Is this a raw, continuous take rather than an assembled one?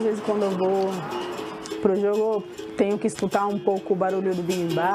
yes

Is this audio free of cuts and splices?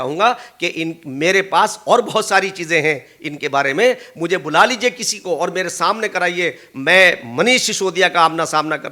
yes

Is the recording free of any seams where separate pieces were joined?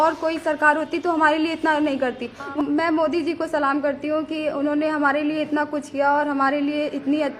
no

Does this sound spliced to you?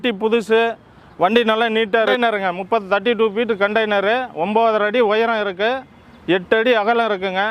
yes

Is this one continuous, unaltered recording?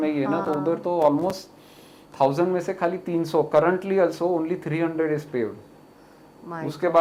yes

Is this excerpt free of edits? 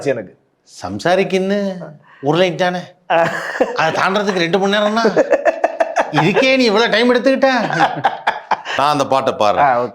no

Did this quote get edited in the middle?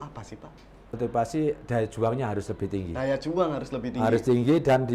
yes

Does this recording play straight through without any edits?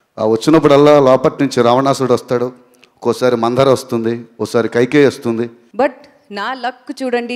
no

